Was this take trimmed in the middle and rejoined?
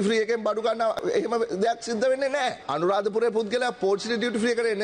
yes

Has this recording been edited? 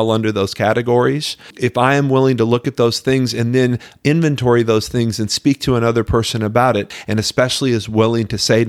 yes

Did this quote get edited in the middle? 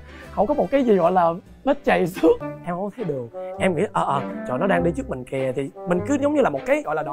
yes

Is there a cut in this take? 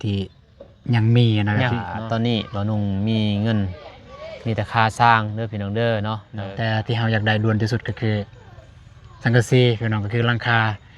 yes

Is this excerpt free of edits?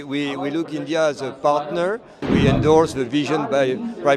no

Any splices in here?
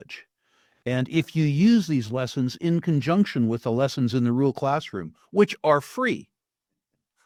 no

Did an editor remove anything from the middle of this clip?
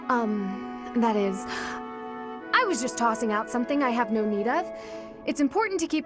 no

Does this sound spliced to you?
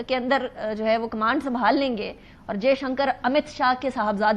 no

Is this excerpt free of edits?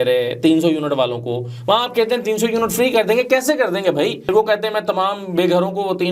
no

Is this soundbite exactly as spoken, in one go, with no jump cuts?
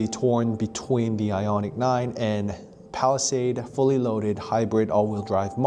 yes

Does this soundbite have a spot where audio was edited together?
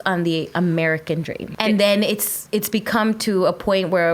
no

